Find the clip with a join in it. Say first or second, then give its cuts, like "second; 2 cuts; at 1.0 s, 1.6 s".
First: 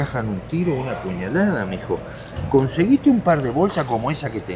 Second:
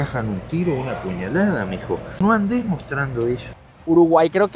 second; 2 cuts; at 2.2 s, 3.5 s